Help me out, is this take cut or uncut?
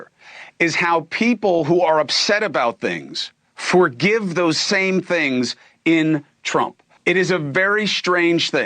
cut